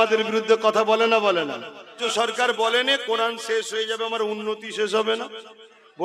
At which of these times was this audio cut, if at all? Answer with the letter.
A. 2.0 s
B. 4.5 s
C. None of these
A